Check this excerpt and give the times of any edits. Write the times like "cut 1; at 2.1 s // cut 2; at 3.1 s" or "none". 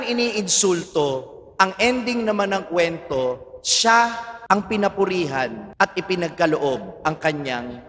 cut 1; at 4.3 s // cut 2; at 5.6 s